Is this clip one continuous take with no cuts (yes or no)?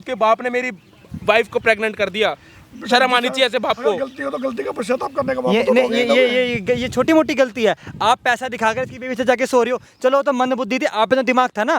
yes